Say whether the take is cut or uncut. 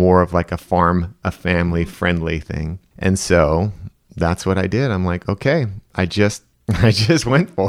cut